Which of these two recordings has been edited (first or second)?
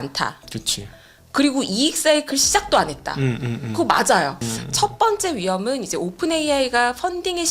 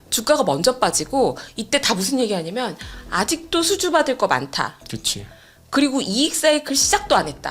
first